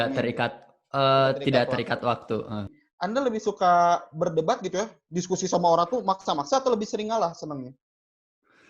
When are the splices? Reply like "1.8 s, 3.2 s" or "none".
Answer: 2.7 s